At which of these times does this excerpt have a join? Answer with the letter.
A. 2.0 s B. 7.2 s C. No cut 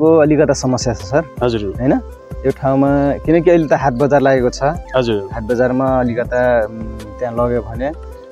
C